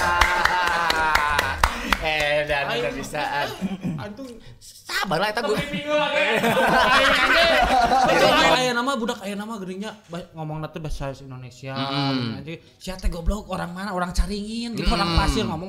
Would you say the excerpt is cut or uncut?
cut